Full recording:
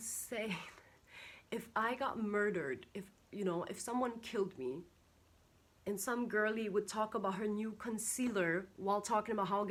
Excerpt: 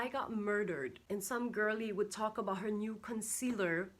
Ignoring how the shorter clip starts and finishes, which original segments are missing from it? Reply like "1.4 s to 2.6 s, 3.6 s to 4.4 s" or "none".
2.8 s to 5.7 s